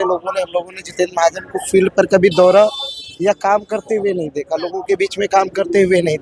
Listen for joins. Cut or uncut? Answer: uncut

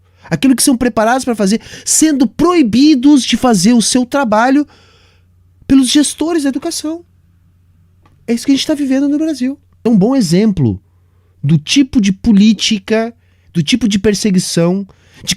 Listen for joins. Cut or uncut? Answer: cut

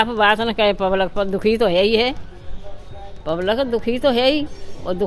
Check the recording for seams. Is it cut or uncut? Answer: uncut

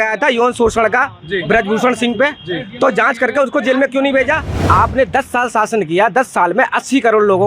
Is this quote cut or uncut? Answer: cut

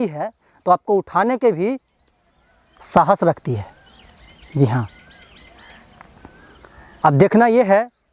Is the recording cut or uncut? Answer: uncut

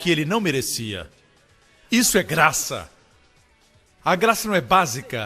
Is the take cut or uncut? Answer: uncut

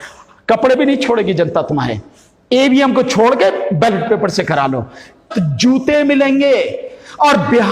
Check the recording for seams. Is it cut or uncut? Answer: cut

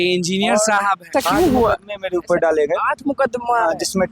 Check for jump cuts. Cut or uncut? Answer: cut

